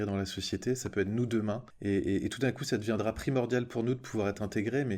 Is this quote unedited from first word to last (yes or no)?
no